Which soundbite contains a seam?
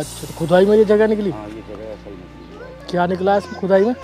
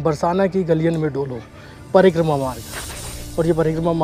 second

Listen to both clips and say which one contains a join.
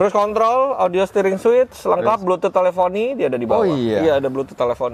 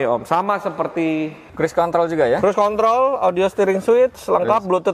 second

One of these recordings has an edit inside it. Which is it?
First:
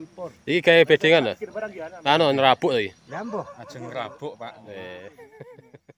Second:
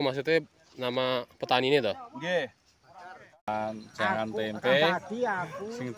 second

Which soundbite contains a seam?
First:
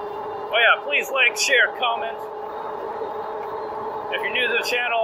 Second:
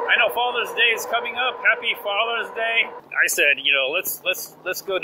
second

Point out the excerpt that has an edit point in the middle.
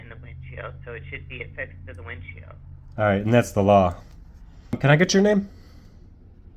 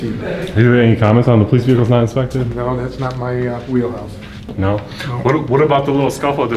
first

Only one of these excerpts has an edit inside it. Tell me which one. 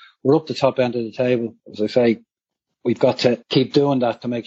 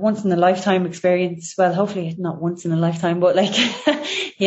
first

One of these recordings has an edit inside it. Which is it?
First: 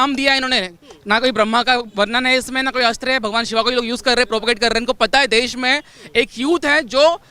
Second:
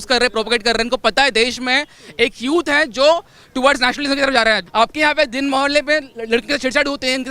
second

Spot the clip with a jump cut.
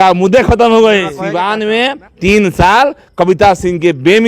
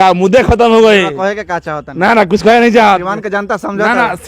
first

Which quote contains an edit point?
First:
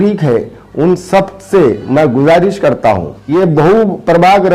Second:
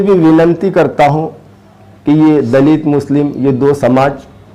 first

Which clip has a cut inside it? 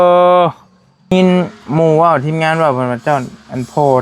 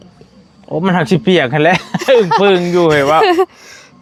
first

